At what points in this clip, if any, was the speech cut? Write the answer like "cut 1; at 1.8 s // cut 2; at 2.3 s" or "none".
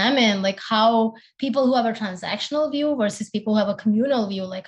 none